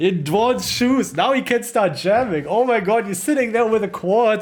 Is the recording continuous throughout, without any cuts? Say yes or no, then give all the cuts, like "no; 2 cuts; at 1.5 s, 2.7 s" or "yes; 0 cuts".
yes; 0 cuts